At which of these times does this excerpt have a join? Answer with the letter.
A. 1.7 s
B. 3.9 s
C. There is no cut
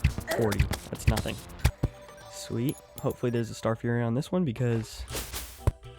A